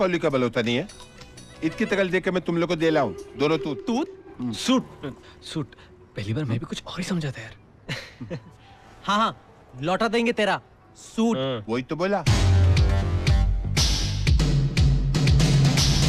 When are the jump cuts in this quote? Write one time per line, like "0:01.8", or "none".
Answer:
none